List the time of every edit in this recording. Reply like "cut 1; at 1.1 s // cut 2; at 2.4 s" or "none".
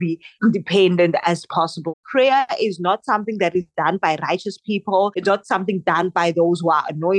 cut 1; at 1.9 s